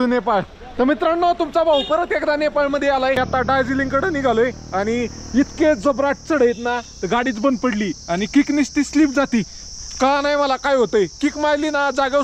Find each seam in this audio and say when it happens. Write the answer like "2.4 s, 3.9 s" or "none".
3.3 s